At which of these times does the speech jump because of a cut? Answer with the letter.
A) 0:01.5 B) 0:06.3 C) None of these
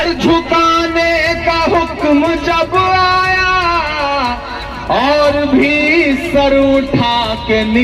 C